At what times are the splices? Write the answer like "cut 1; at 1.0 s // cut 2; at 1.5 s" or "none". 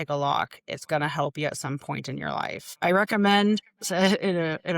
cut 1; at 2.6 s